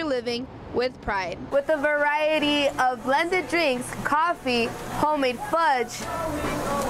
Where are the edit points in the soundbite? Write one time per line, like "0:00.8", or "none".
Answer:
0:01.4